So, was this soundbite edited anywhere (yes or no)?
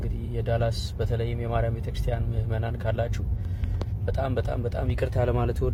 no